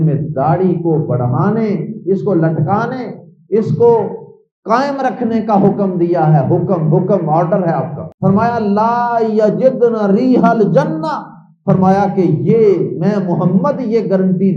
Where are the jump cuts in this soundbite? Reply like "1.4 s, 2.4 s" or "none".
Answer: 8.0 s